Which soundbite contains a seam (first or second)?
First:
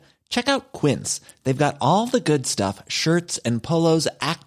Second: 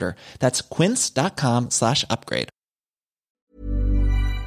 second